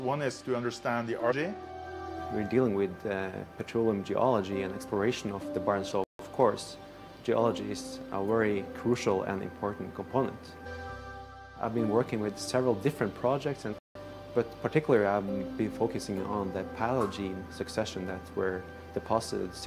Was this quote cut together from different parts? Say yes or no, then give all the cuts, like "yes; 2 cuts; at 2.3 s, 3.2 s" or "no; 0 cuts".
yes; 4 cuts; at 1.4 s, 5.9 s, 10.7 s, 13.8 s